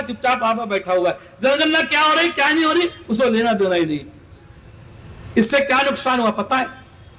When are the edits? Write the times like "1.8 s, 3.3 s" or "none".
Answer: none